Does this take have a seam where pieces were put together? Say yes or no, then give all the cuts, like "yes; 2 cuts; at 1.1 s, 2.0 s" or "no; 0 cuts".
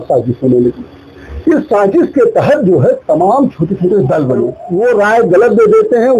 yes; 1 cut; at 4.6 s